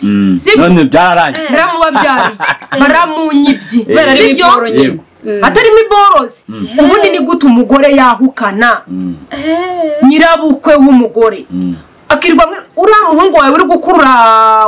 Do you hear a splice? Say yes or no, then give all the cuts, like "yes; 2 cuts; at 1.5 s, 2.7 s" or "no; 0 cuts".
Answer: no; 0 cuts